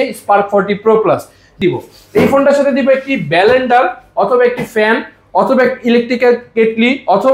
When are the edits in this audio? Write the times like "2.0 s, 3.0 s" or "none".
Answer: 1.4 s